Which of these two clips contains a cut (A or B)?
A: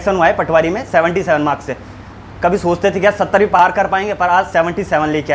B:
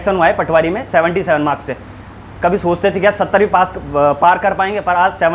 A